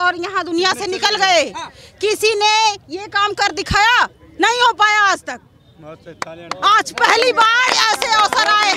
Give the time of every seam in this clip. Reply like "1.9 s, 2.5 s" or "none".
none